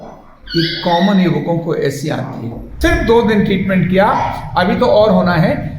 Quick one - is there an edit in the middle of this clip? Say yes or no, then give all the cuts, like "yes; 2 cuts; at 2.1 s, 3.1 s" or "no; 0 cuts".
yes; 1 cut; at 2.6 s